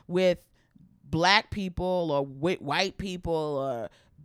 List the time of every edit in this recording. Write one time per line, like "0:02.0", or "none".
none